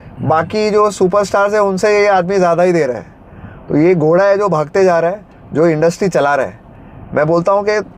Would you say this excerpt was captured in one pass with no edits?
yes; 0 cuts

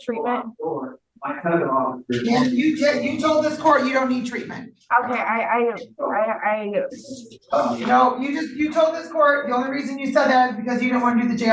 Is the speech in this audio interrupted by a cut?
no; 0 cuts

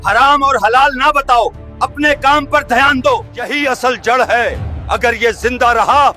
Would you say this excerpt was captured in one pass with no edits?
no; 1 cut; at 3.4 s

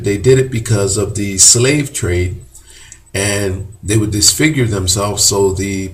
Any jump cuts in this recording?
yes; 1 cut; at 1.4 s

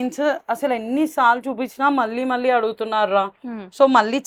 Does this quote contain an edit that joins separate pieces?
no; 0 cuts

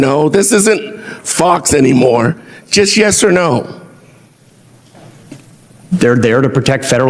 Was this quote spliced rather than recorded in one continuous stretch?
no; 0 cuts

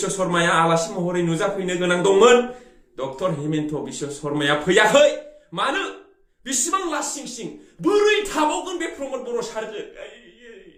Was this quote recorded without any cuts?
yes; 0 cuts

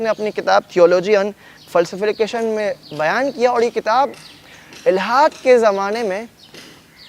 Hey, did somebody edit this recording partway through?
no; 0 cuts

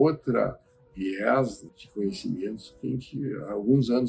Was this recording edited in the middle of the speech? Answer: no; 0 cuts

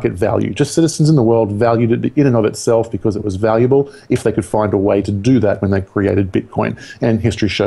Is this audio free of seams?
yes; 0 cuts

